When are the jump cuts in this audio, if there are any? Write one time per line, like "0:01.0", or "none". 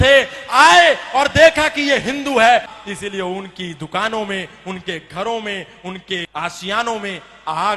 0:02.7
0:06.3